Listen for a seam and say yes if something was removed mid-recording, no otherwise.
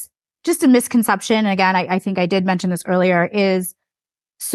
no